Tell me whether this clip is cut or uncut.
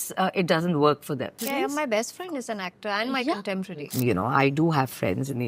cut